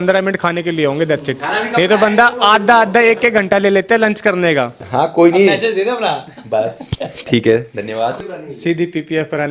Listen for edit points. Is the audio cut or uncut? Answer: cut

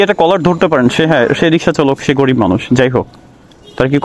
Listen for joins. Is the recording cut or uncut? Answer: uncut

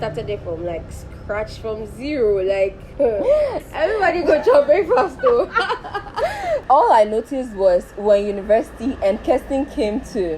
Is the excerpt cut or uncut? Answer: cut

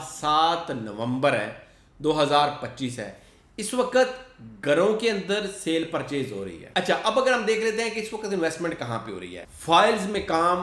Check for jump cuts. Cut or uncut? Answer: cut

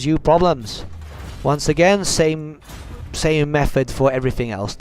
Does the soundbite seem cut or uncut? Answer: cut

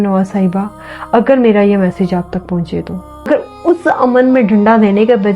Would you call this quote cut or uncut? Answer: cut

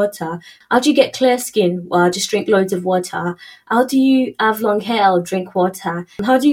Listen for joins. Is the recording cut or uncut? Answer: uncut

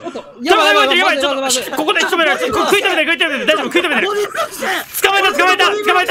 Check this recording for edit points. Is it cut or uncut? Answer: uncut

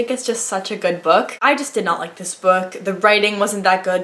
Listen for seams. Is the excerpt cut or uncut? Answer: cut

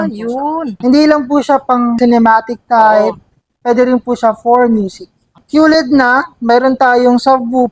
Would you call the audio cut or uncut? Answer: cut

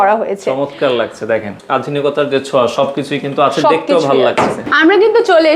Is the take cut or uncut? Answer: cut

